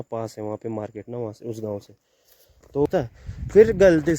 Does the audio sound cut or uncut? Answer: cut